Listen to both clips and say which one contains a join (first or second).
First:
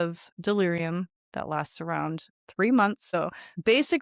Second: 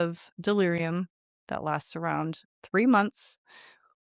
first